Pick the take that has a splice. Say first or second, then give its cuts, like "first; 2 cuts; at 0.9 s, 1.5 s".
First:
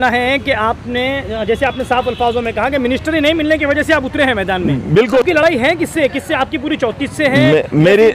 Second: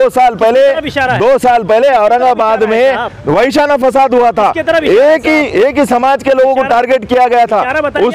first; 1 cut; at 5.2 s